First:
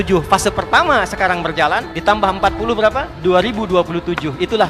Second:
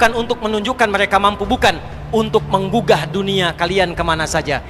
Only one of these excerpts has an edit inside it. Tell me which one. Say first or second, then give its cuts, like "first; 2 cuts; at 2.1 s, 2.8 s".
first; 2 cuts; at 1.9 s, 3.1 s